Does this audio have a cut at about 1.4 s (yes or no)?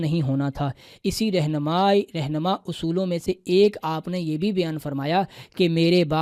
no